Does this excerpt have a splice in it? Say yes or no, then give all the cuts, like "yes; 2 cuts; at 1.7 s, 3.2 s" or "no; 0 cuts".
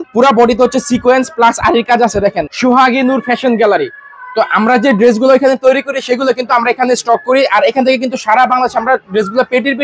yes; 1 cut; at 2.5 s